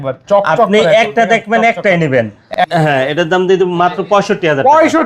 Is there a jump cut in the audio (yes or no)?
yes